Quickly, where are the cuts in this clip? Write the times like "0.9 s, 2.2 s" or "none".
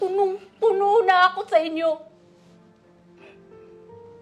2.1 s